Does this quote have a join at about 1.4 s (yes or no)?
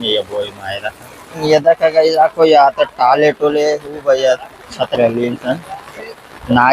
yes